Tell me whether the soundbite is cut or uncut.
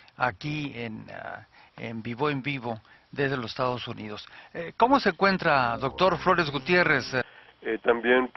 uncut